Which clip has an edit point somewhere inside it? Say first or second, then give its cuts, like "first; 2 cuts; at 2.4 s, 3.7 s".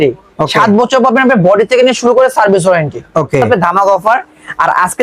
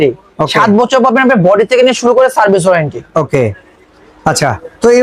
first; 1 cut; at 3.5 s